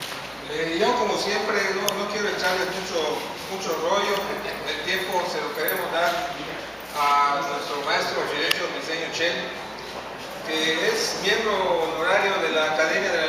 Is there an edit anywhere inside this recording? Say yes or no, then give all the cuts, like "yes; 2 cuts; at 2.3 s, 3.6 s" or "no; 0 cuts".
no; 0 cuts